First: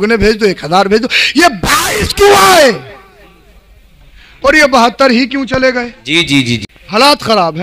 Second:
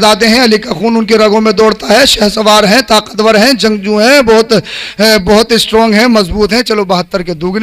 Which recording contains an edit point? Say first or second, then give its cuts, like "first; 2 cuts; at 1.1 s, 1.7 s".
first; 1 cut; at 6.6 s